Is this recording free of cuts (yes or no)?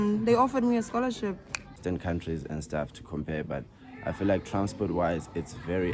no